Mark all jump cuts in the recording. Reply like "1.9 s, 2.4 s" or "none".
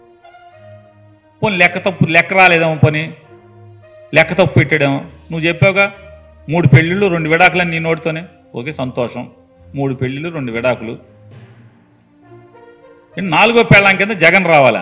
none